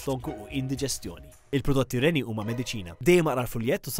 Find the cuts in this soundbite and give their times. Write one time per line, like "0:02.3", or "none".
none